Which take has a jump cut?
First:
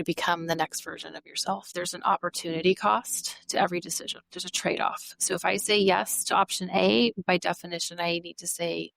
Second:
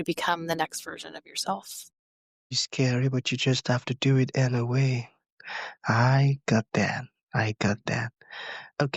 first; 1 cut; at 1.7 s

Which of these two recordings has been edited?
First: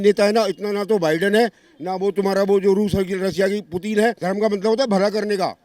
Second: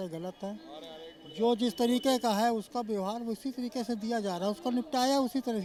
first; 1 cut; at 4.2 s

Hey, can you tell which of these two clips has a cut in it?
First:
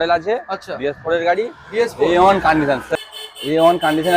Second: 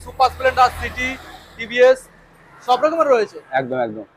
first; 1 cut; at 2.9 s

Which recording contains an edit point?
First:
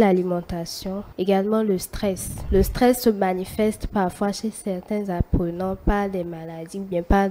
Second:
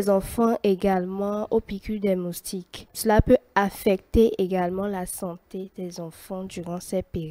first; 2 cuts; at 1.1 s, 2.3 s

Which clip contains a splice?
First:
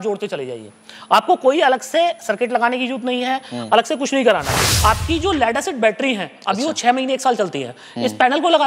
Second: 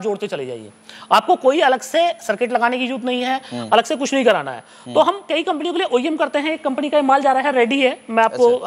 first; 1 cut; at 4.7 s

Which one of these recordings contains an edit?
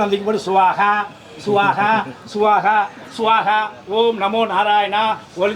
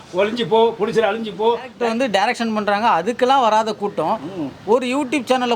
second; 1 cut; at 1.7 s

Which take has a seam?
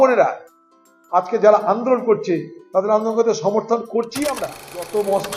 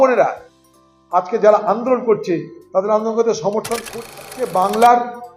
first; 1 cut; at 4.2 s

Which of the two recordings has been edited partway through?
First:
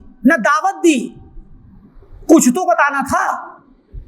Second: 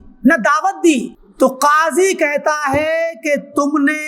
second; 1 cut; at 1.2 s

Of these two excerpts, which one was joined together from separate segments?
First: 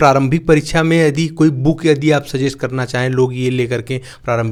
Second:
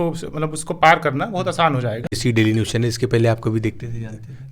second; 1 cut; at 2.1 s

